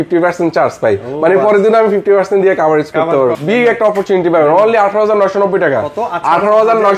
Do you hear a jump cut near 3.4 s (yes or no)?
yes